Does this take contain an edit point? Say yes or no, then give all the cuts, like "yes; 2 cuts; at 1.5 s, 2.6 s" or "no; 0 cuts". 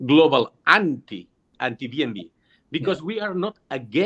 yes; 1 cut; at 1.5 s